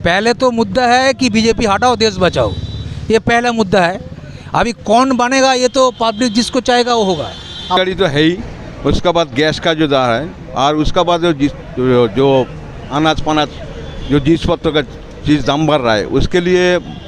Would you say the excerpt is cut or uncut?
cut